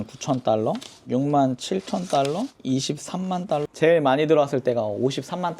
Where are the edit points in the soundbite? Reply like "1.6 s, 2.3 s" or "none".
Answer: 0.9 s, 2.6 s, 3.7 s